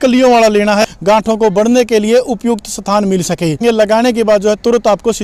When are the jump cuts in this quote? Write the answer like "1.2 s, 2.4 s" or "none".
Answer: 0.8 s, 3.6 s